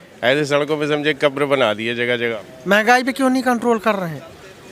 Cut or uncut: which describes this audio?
cut